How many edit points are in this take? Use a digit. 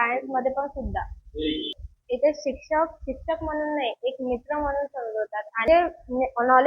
2